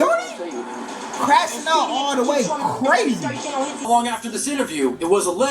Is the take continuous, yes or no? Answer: no